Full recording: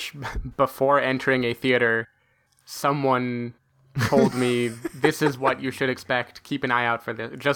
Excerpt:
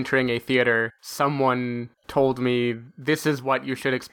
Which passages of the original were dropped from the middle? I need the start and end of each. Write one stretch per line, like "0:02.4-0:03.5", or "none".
0:02.2-0:02.6
0:03.6-0:03.9

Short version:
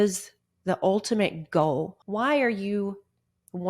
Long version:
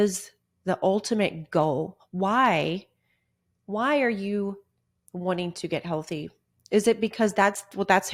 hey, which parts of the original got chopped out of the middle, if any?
0:02.0-0:03.6

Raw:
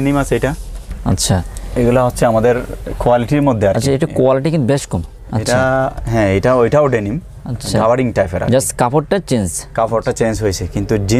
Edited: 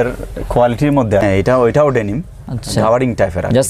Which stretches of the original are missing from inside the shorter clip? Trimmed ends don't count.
0:03.7-0:06.2

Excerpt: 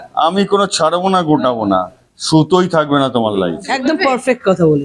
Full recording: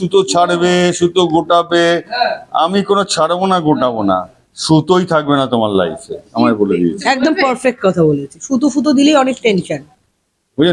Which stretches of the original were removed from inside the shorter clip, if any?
0:06.2-0:07.2

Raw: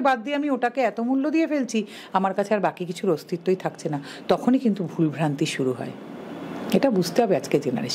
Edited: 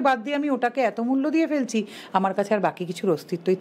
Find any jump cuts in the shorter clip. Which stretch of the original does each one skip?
none

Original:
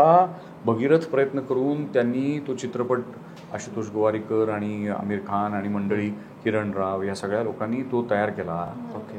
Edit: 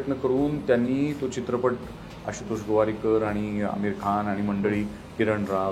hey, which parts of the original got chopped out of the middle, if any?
none

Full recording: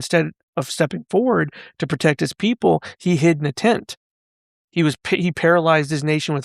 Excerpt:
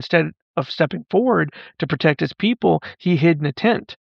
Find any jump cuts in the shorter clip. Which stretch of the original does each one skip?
none

